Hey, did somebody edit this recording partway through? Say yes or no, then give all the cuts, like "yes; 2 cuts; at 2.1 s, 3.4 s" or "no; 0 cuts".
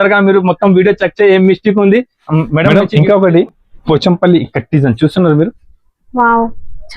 yes; 1 cut; at 2.8 s